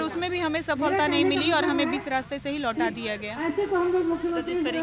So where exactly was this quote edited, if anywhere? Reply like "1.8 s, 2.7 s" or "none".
none